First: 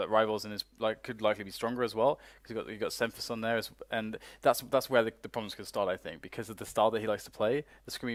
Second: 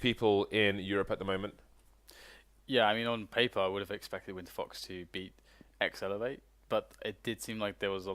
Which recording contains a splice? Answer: second; 1 cut; at 3.2 s

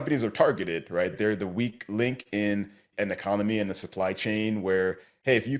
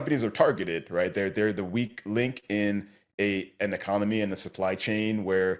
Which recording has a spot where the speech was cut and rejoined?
first; 2 cuts; at 1.1 s, 2.9 s

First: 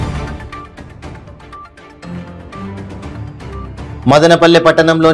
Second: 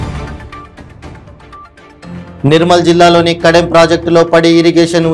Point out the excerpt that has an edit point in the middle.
second; 1 cut; at 2.2 s

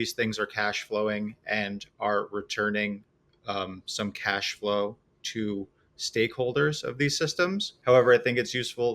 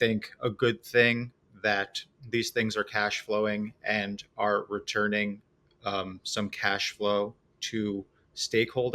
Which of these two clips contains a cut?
first; 1 cut; at 7.7 s

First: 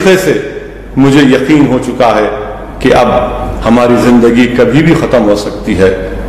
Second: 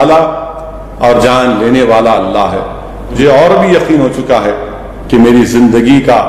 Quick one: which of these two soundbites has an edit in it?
second; 1 cut; at 3.2 s

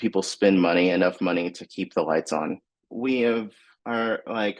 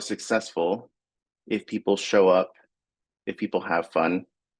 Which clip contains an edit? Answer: first; 1 cut; at 2.7 s

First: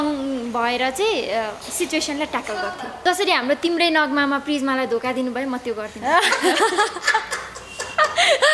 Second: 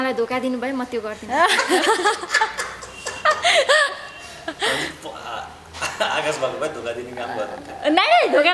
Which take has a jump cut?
first; 1 cut; at 2.9 s

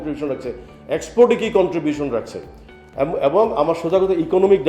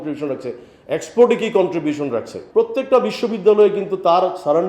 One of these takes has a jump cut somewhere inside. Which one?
second; 1 cut; at 2.4 s

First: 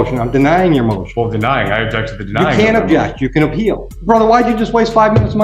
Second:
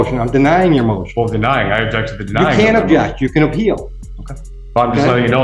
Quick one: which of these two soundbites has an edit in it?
first; 1 cut; at 3.9 s

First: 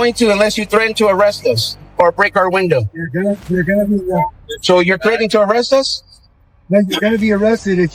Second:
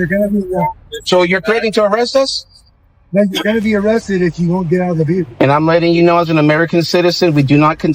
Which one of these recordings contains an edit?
second; 1 cut; at 5.3 s

